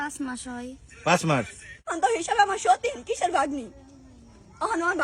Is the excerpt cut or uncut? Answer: cut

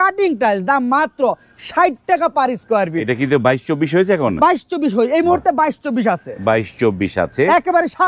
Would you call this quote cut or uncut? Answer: uncut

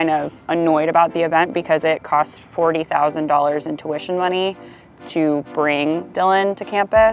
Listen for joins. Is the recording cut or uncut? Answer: uncut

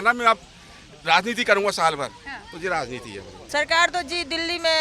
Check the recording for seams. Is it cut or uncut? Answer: cut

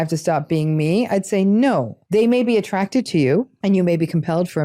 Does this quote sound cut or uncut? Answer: cut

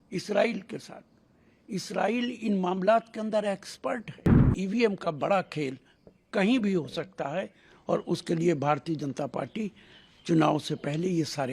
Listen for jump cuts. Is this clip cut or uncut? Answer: cut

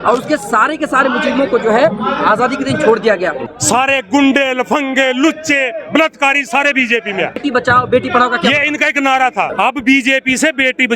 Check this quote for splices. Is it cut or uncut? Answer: cut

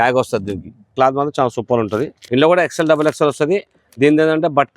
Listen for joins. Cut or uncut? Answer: cut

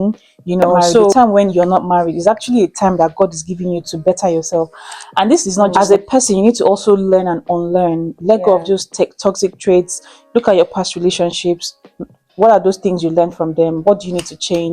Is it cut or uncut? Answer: cut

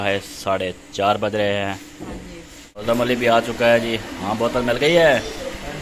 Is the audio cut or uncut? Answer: cut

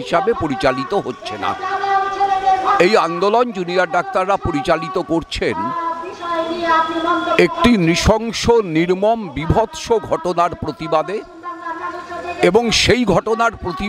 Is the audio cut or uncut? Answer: uncut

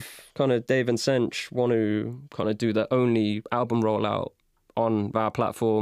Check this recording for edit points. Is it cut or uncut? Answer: cut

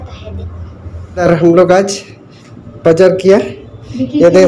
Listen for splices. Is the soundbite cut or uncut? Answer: cut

